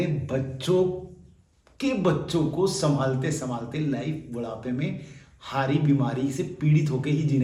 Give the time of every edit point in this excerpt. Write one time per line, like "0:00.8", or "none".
none